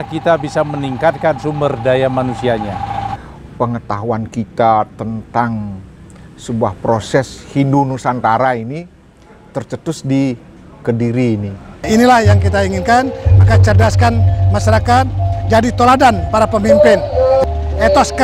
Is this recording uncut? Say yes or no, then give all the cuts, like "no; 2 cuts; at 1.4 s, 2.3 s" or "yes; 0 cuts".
no; 2 cuts; at 3.2 s, 11.8 s